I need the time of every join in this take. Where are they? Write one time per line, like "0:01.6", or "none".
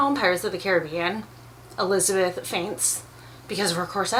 none